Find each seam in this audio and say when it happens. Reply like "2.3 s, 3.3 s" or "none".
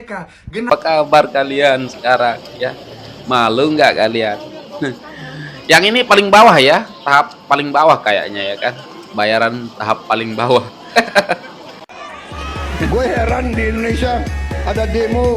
0.7 s, 11.4 s